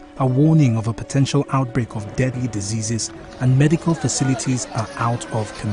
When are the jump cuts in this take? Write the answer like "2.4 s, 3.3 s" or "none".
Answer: 4.4 s